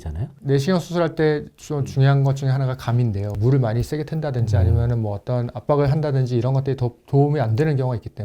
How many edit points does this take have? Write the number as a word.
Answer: one